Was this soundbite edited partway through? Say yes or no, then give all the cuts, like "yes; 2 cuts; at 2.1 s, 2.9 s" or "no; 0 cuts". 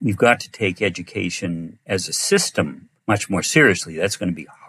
yes; 1 cut; at 2.9 s